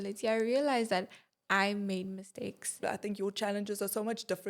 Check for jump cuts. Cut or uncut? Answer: cut